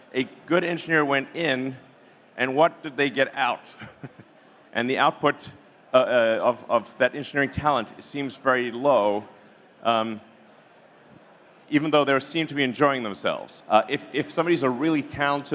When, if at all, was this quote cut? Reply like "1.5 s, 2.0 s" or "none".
13.5 s